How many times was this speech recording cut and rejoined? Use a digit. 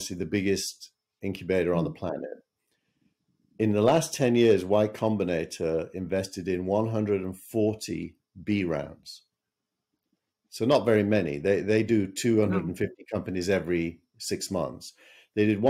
0